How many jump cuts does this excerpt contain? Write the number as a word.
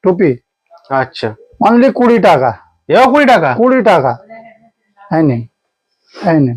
zero